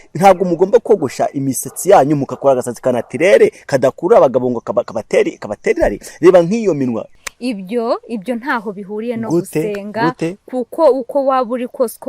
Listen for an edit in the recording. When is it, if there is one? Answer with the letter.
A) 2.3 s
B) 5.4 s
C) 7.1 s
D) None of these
C